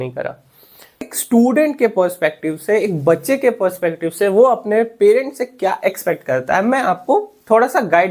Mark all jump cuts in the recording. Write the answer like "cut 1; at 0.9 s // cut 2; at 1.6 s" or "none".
cut 1; at 0.9 s

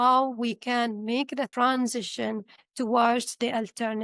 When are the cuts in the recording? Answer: cut 1; at 1.5 s

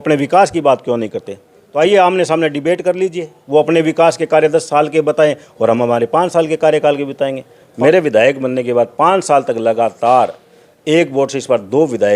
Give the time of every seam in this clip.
cut 1; at 1.6 s // cut 2; at 7.6 s

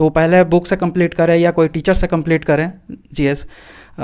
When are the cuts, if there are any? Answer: none

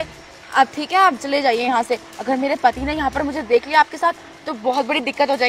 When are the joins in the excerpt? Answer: none

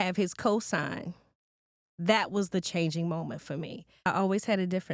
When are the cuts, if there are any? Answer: cut 1; at 4.0 s

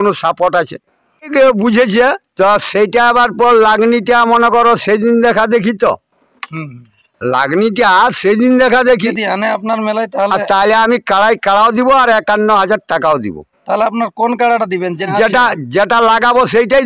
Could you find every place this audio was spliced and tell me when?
cut 1; at 1.3 s // cut 2; at 9.1 s // cut 3; at 15.1 s

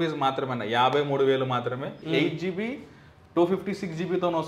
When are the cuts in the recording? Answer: cut 1; at 2.1 s

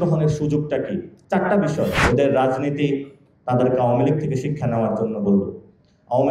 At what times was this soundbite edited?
cut 1; at 1.1 s // cut 2; at 2.0 s

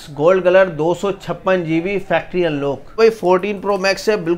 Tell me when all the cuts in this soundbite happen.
cut 1; at 3.0 s

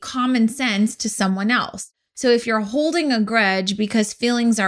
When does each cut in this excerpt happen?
cut 1; at 1.9 s

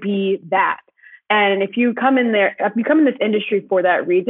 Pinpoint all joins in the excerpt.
none

